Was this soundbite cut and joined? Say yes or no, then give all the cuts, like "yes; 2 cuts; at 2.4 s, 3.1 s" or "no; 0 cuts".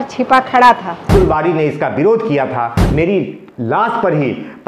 yes; 2 cuts; at 1.1 s, 2.8 s